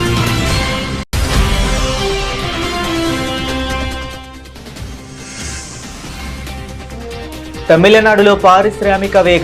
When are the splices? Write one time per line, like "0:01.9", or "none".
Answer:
none